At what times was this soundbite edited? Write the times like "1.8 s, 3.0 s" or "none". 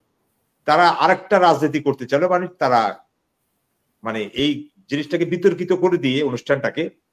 none

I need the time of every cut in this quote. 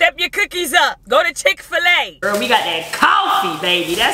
1.0 s, 2.1 s

